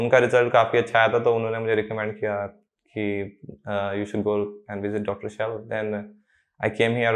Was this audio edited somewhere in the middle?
no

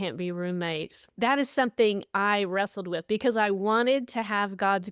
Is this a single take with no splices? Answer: no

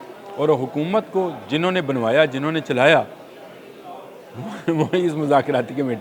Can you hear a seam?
no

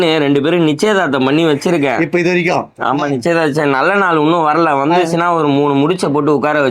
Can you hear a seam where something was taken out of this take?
no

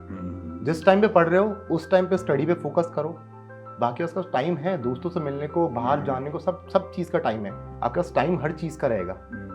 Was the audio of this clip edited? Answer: yes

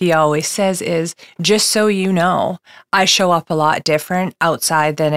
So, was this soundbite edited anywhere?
no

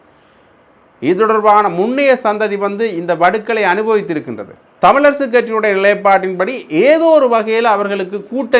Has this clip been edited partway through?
yes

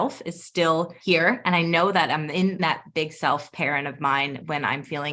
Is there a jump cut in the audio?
yes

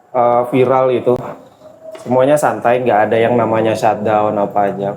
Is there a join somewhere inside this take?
no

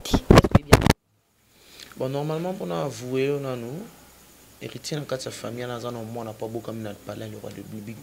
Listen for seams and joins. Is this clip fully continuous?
yes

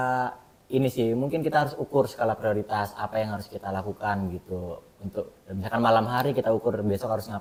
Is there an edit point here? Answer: no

